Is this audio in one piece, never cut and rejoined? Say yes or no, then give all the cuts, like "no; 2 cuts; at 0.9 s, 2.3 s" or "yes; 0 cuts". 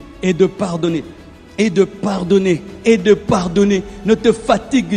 yes; 0 cuts